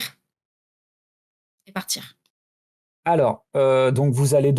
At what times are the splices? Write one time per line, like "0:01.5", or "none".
none